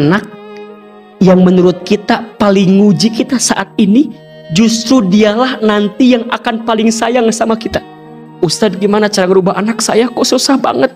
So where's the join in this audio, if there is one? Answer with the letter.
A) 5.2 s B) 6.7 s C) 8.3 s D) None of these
C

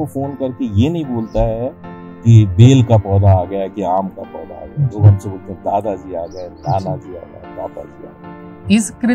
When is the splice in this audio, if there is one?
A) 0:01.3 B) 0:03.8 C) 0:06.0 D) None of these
D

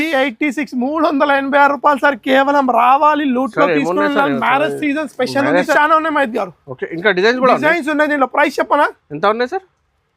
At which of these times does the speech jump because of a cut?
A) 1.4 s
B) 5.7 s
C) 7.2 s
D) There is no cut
B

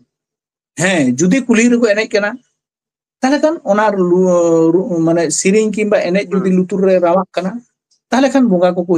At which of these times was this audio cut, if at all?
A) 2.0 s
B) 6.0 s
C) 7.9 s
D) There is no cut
D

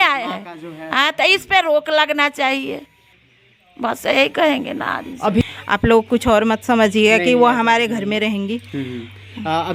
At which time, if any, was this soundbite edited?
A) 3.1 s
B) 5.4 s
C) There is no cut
B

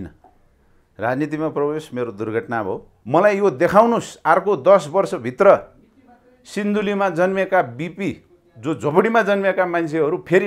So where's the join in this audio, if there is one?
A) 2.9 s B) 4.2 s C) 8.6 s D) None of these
A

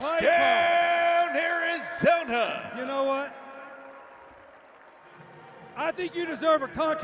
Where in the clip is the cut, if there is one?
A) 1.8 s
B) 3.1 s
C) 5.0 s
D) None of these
A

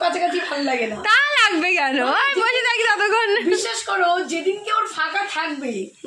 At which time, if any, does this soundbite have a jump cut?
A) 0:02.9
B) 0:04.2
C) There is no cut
C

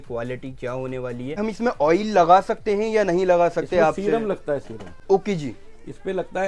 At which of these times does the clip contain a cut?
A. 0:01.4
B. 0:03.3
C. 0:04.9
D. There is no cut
A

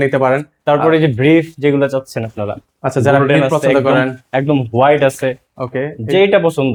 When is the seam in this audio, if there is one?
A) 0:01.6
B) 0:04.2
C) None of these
C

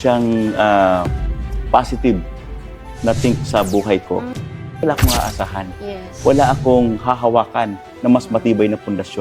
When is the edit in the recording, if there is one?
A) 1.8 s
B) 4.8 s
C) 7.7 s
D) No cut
B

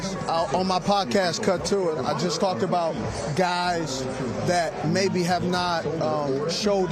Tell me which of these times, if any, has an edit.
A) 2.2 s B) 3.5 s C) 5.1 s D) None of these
D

